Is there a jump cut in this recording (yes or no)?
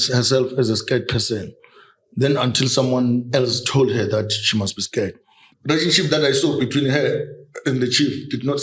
yes